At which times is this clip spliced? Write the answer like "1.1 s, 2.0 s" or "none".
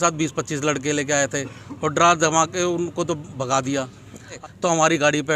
4.4 s